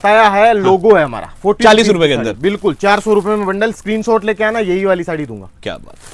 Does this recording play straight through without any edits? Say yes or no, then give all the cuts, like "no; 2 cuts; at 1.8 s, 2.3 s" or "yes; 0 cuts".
yes; 0 cuts